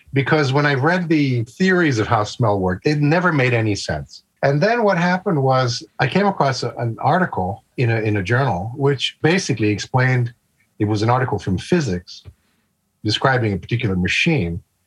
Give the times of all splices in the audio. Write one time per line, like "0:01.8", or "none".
0:02.8
0:06.7